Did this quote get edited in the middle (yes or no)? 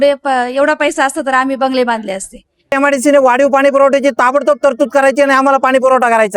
yes